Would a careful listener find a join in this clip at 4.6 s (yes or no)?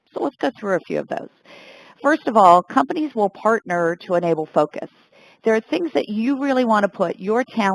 yes